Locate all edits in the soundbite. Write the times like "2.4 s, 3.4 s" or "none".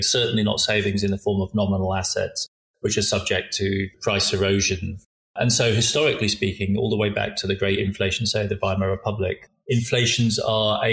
4.0 s, 5.3 s, 9.4 s